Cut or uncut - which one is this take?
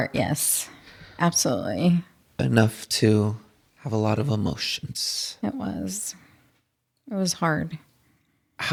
uncut